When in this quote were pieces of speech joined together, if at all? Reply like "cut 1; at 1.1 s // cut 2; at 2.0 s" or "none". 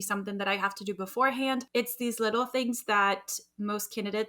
cut 1; at 1.7 s